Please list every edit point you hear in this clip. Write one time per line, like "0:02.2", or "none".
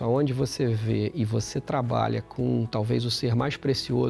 none